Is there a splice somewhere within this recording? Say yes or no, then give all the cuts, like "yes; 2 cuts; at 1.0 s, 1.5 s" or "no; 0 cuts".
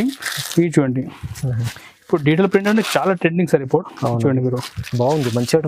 no; 0 cuts